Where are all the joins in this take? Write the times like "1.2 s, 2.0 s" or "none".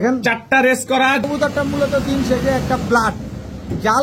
1.2 s